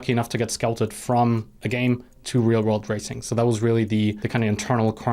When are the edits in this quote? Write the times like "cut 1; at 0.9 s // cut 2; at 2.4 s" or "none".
cut 1; at 4.2 s

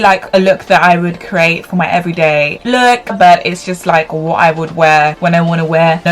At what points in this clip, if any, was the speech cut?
cut 1; at 3.1 s

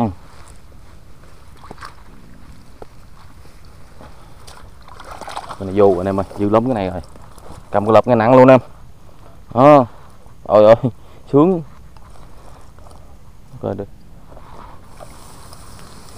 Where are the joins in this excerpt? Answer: cut 1; at 13.9 s

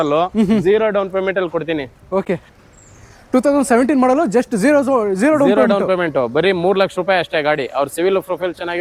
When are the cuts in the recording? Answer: none

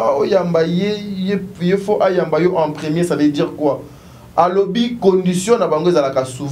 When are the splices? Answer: none

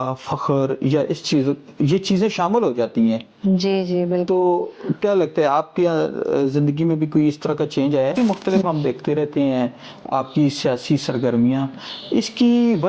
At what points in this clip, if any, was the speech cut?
cut 1; at 8.2 s

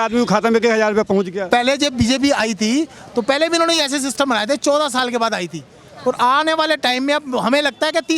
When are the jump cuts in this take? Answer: cut 1; at 1.4 s

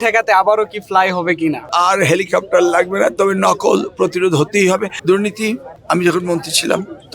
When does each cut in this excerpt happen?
cut 1; at 1.7 s // cut 2; at 4.9 s

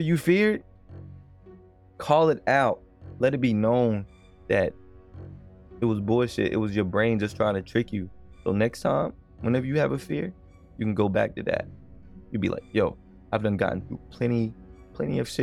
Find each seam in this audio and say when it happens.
none

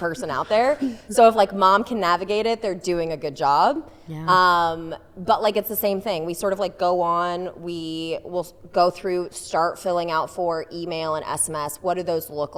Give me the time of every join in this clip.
none

